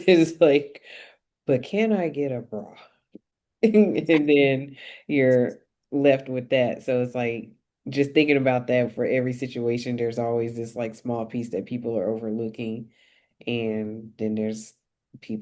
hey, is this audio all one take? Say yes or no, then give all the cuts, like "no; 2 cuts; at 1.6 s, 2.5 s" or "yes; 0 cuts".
yes; 0 cuts